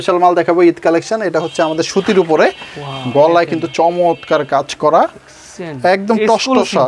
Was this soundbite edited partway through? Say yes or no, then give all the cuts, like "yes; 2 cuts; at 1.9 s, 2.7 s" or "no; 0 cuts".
no; 0 cuts